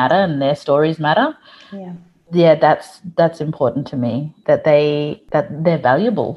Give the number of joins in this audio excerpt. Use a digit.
2